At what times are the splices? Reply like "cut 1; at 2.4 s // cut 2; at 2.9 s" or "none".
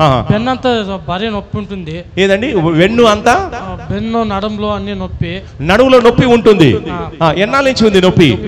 none